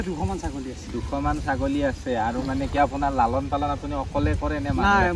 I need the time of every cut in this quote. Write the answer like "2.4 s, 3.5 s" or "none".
none